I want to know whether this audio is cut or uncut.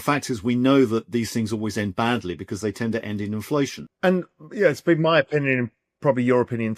cut